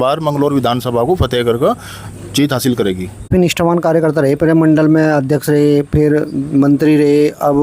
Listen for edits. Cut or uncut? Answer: cut